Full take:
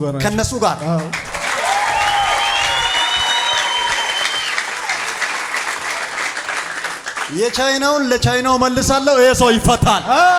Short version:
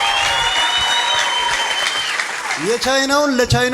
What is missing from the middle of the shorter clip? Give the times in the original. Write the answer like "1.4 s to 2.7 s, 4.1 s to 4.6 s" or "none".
4.9 s to 7.2 s